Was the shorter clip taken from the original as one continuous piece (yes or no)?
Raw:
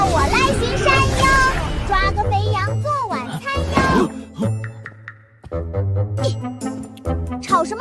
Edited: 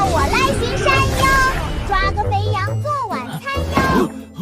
yes